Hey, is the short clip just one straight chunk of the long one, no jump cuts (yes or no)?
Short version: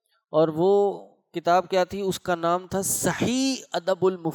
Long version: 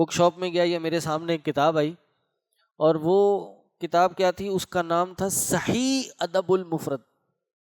yes